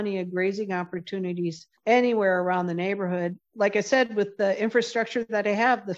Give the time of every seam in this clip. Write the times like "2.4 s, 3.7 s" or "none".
1.7 s, 3.4 s